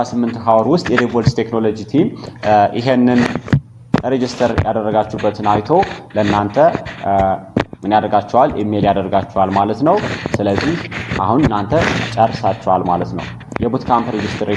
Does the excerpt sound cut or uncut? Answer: uncut